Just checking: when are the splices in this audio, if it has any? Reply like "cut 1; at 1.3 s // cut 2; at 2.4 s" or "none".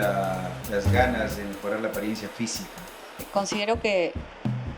cut 1; at 3.3 s